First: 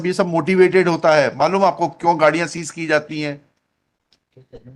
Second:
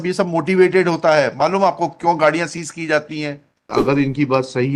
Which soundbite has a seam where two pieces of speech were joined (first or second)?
second